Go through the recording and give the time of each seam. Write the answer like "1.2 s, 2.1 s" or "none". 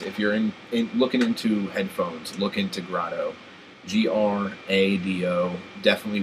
3.7 s